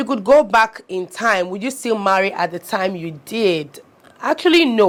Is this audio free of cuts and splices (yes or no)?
yes